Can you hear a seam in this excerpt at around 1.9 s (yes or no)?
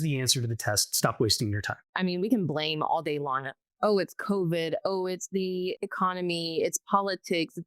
yes